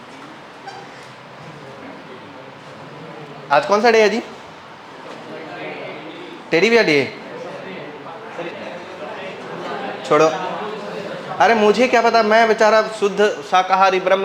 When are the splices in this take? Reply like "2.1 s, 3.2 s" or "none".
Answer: 8.5 s